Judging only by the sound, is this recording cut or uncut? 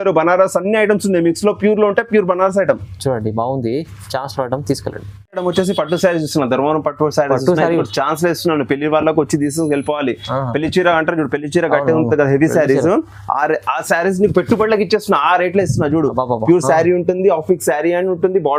uncut